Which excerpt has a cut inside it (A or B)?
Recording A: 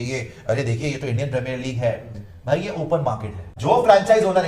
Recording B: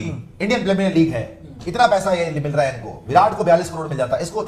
A